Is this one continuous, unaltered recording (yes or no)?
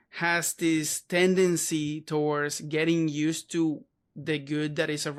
yes